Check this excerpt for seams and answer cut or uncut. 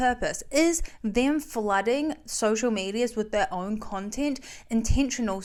uncut